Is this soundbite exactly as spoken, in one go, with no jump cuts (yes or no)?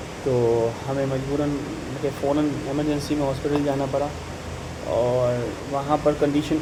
yes